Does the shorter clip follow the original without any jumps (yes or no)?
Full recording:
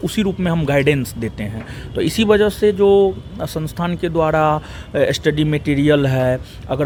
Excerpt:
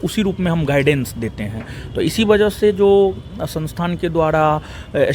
yes